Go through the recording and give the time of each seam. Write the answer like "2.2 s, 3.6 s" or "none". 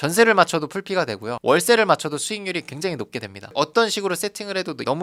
none